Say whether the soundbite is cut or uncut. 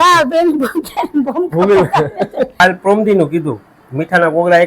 cut